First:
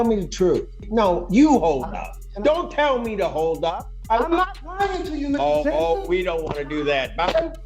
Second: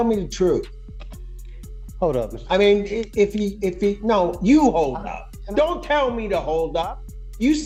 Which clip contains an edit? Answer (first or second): first